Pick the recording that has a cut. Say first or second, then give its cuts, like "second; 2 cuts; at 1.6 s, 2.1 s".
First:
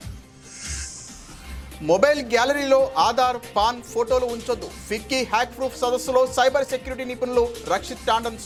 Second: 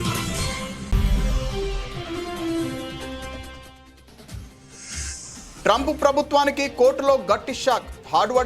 second; 1 cut; at 5.2 s